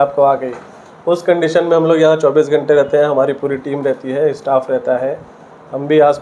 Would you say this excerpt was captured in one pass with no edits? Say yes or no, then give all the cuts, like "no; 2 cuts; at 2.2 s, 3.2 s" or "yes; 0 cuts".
yes; 0 cuts